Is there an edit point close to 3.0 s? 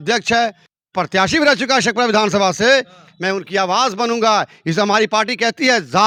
no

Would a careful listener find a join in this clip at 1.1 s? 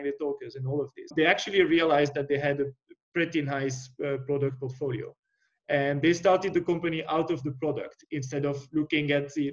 yes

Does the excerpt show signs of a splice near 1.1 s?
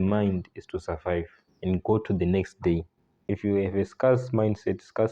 no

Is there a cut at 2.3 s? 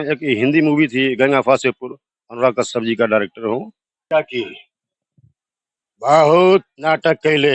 no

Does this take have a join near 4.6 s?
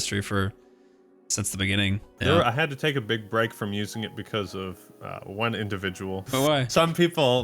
no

